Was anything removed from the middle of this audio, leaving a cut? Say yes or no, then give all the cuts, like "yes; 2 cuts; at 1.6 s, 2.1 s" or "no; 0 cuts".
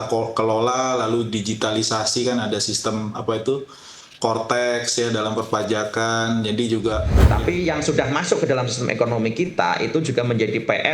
yes; 1 cut; at 7.2 s